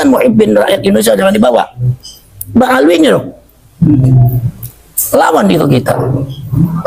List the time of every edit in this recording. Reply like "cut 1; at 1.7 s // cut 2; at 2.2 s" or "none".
none